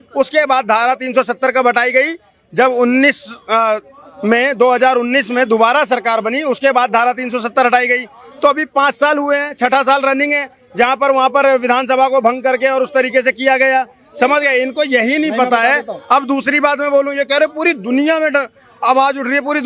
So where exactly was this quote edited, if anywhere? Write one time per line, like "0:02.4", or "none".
none